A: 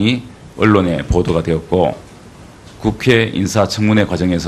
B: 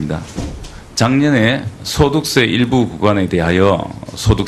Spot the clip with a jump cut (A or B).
B